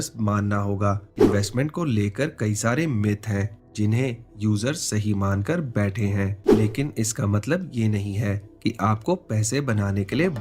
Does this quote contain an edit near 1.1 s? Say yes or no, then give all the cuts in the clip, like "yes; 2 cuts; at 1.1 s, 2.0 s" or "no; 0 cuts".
yes; 2 cuts; at 1.1 s, 6.4 s